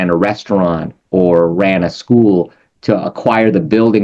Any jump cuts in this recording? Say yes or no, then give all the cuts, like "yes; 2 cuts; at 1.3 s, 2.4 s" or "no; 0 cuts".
no; 0 cuts